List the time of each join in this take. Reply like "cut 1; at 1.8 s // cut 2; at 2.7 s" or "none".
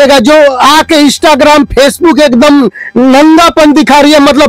none